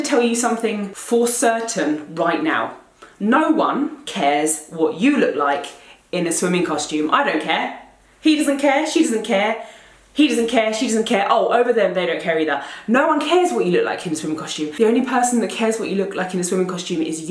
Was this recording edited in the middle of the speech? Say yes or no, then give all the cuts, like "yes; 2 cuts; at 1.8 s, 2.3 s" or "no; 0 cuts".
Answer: yes; 1 cut; at 0.9 s